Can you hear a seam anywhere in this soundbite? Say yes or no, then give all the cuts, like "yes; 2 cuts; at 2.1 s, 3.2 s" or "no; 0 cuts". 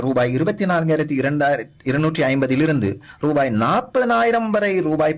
no; 0 cuts